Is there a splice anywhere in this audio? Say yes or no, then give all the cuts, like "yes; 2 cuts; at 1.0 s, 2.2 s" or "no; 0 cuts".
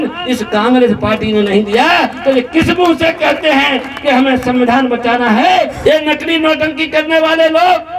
yes; 1 cut; at 5.7 s